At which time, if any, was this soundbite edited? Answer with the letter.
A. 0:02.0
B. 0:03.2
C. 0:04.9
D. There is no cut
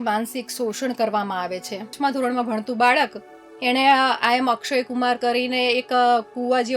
A